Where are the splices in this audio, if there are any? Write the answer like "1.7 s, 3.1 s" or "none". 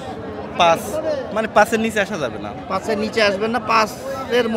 none